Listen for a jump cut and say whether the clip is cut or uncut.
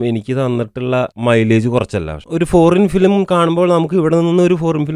cut